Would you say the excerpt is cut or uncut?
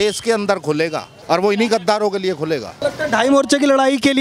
cut